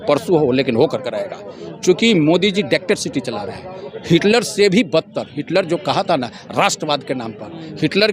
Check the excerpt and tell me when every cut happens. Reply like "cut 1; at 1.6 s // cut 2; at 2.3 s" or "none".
none